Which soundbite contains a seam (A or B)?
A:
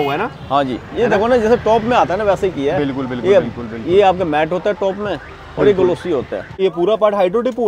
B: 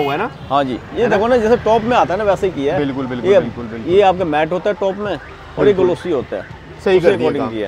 A